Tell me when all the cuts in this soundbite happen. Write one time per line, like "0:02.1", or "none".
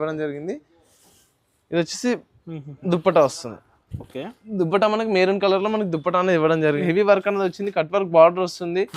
0:06.8